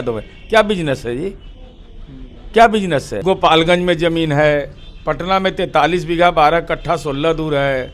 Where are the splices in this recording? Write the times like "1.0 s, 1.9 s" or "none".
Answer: 3.2 s